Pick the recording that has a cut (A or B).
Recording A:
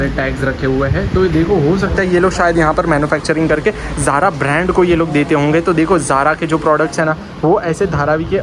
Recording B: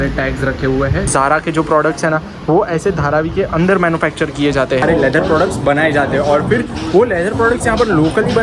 B